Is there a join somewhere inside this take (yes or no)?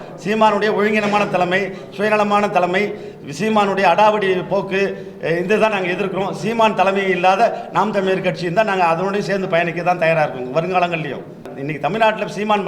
yes